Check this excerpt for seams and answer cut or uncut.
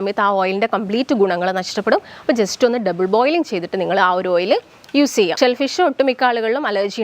cut